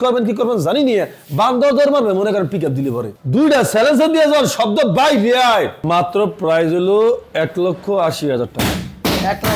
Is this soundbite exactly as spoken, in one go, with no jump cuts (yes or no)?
no